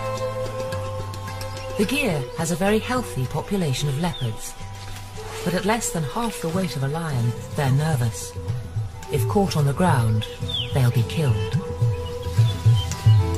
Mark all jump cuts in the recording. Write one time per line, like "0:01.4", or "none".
none